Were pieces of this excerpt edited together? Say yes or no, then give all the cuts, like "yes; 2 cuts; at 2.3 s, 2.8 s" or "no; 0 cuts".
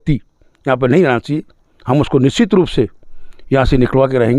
no; 0 cuts